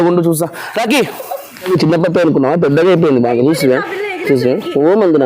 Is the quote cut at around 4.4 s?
no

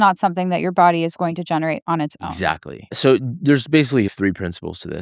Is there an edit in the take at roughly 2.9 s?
yes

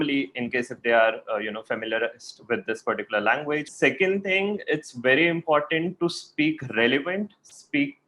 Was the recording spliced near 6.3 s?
no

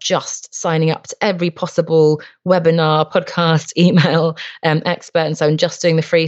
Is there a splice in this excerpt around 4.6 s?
no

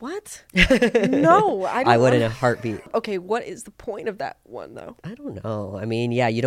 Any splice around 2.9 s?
yes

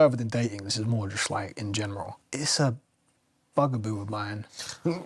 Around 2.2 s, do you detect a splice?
yes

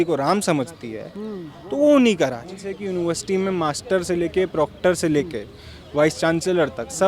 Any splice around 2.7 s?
yes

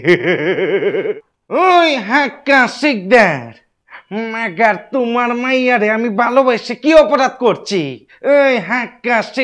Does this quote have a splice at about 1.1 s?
yes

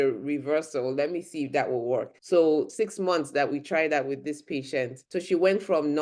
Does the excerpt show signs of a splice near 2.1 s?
yes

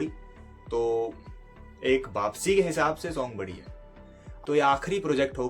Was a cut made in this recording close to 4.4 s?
yes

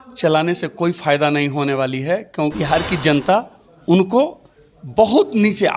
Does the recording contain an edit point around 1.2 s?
no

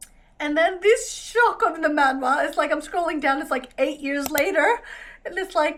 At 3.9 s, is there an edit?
no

